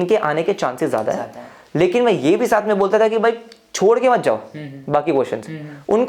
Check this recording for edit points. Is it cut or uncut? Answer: uncut